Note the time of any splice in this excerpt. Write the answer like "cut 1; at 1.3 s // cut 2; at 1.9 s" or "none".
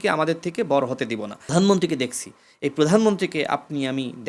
cut 1; at 1.5 s